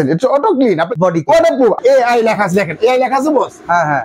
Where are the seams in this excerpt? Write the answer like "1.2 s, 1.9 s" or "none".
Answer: 0.9 s, 1.8 s